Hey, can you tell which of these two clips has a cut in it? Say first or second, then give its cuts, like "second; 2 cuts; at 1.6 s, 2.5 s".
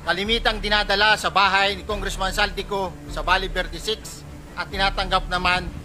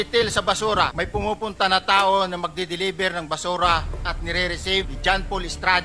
second; 2 cuts; at 1.0 s, 4.9 s